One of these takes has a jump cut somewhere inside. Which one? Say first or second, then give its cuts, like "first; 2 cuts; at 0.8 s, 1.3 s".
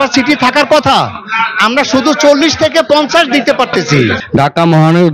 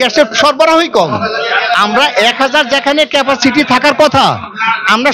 first; 1 cut; at 4.2 s